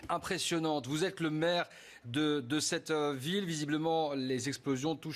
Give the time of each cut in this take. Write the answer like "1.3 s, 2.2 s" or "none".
none